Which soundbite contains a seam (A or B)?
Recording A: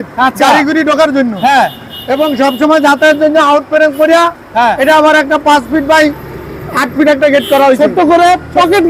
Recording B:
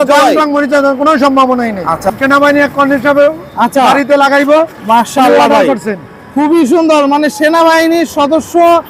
B